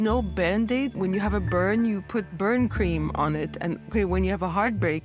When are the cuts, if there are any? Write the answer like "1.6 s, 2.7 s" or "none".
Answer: 0.9 s